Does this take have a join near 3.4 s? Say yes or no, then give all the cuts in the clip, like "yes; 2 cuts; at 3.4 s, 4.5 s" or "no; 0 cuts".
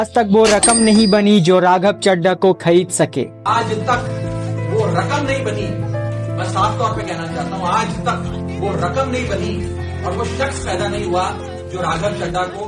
no; 0 cuts